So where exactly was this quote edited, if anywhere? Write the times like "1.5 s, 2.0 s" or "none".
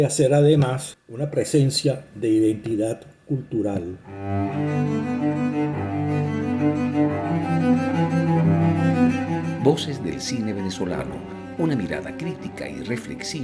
4.1 s